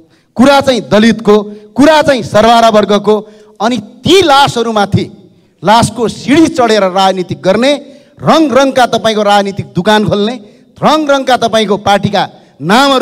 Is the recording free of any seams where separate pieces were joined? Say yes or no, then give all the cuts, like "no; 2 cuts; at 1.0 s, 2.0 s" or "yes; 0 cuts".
yes; 0 cuts